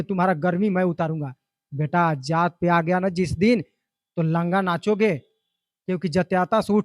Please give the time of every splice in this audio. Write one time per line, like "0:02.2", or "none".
none